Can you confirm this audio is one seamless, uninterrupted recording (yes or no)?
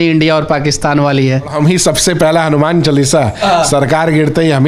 no